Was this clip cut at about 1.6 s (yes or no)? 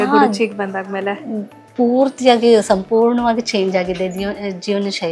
no